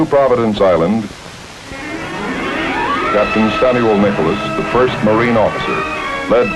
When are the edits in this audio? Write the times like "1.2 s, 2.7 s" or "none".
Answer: 4.8 s